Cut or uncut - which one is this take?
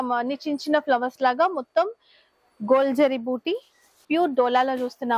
cut